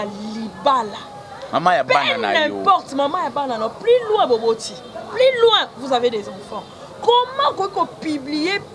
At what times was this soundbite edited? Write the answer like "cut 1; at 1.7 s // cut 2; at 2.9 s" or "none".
none